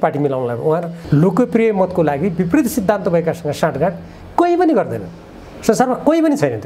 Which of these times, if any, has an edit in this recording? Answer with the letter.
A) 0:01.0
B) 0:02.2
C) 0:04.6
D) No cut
A